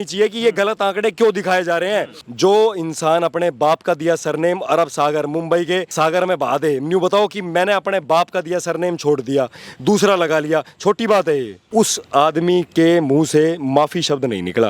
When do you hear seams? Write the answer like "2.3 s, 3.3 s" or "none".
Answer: 2.2 s, 5.9 s, 11.6 s

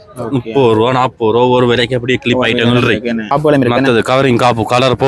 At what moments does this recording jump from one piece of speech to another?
3.3 s

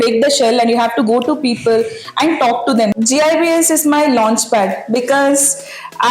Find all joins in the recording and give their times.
2.9 s

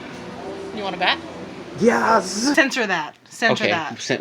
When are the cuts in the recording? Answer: 2.5 s

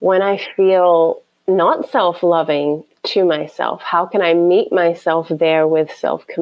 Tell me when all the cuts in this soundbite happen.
none

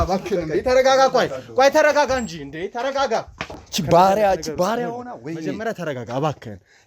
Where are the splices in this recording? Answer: 3.6 s

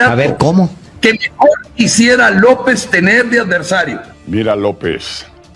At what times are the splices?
4.1 s

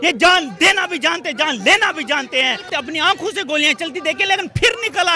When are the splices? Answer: 2.7 s

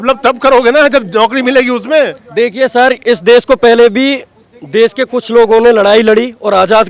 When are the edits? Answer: none

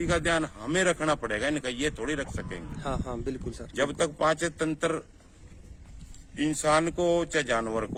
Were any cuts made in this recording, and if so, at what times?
none

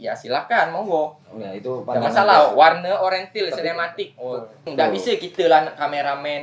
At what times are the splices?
4.6 s

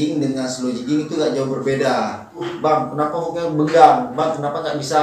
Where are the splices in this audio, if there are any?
2.5 s

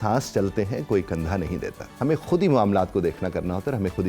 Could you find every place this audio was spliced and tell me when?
1.8 s

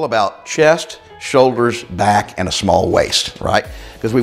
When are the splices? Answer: none

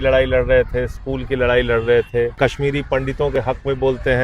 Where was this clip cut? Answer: 2.4 s

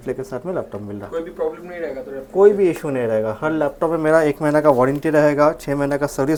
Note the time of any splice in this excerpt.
none

